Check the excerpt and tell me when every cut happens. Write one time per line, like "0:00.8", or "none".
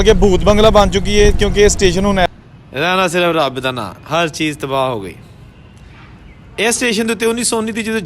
0:02.3